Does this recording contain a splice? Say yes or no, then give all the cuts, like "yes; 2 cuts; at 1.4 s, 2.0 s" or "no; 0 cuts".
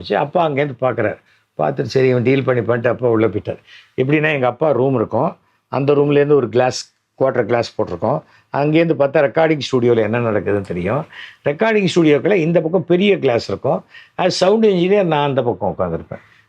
no; 0 cuts